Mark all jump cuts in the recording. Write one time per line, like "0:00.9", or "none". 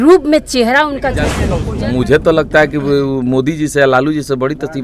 0:01.5